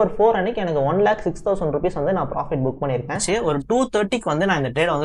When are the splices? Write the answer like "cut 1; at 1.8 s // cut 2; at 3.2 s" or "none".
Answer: cut 1; at 3.2 s